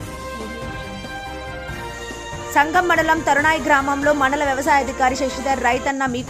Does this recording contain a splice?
yes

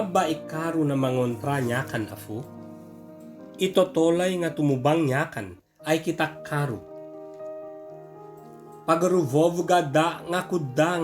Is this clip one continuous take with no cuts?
no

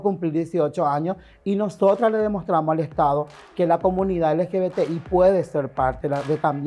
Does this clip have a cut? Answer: no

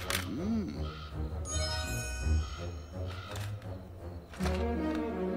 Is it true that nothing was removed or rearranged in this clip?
yes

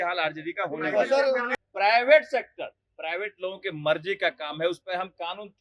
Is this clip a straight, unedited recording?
no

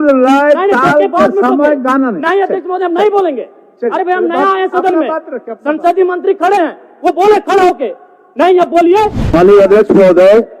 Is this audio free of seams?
no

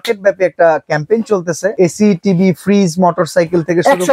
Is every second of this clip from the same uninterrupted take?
no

